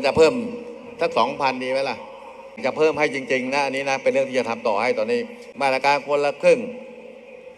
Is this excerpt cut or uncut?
cut